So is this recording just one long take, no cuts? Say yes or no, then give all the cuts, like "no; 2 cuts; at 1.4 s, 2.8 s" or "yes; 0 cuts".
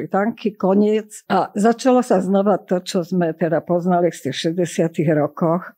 no; 1 cut; at 1.1 s